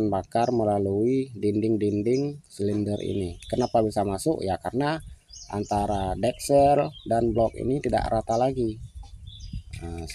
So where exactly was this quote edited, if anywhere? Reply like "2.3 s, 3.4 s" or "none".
none